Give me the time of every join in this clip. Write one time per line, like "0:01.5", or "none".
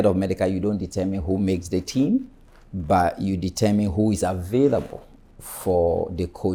none